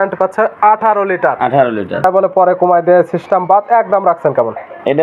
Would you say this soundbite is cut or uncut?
cut